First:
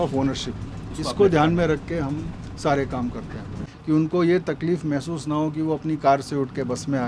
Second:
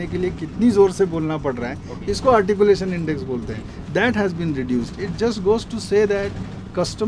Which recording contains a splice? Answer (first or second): first